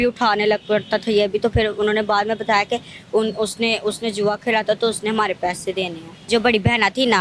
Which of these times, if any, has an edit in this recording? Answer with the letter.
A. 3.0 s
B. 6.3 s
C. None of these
B